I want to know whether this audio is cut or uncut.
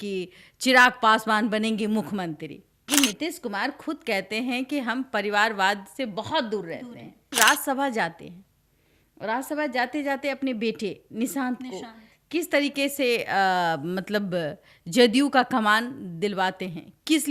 cut